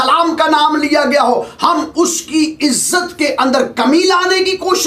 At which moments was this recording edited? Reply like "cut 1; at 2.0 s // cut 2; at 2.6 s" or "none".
none